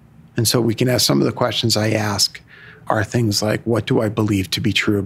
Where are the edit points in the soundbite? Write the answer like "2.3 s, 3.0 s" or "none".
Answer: 2.8 s